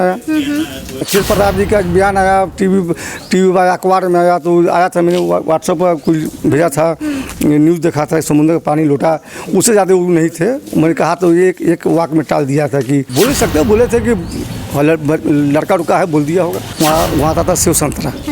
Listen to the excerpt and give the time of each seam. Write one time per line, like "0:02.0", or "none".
0:01.1
0:13.1
0:16.6